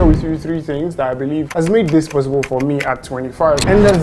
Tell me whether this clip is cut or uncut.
uncut